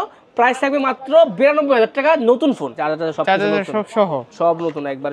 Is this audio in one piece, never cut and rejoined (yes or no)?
no